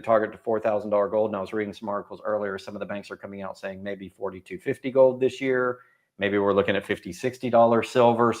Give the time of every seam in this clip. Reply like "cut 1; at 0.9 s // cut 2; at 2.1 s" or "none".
none